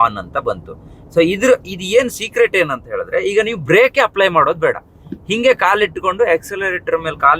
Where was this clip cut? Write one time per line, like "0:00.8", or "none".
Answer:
none